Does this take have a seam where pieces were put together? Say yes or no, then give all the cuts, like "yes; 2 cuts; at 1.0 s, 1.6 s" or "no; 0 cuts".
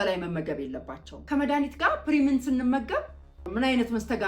yes; 1 cut; at 1.1 s